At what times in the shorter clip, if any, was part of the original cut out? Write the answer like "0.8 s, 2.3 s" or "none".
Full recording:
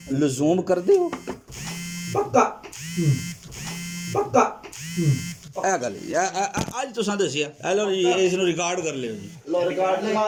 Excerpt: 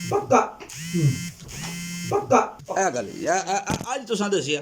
2.6 s